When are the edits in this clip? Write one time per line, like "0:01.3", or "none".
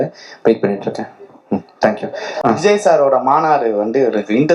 0:02.3